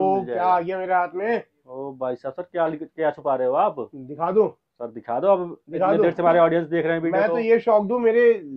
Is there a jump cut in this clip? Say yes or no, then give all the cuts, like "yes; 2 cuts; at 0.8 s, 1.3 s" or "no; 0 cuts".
no; 0 cuts